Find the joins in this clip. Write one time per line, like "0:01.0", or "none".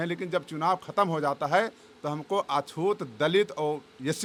none

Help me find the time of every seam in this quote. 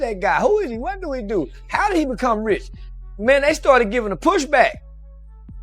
0:04.7

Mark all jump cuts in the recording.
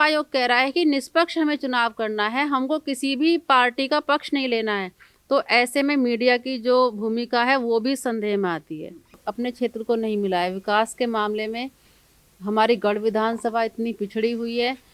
0:09.2

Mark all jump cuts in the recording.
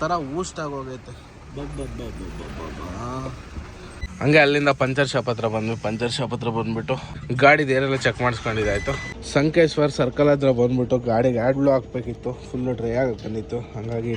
0:04.0
0:09.1

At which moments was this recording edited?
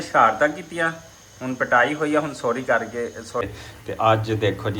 0:03.5

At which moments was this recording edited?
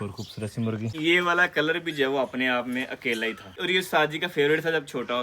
0:00.9
0:03.6

